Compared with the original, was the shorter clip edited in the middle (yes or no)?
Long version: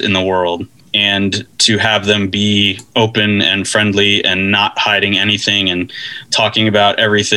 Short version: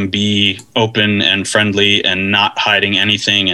no